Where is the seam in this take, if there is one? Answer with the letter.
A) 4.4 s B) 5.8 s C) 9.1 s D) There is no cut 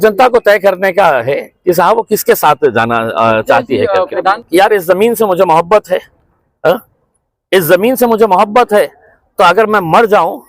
A